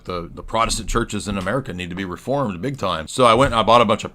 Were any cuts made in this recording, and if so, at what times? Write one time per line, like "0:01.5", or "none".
0:03.1